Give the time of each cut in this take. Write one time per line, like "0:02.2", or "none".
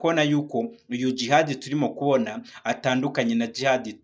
none